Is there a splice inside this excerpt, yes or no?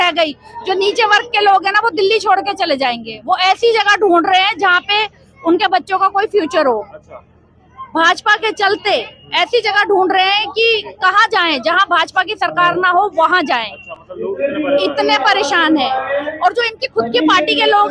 no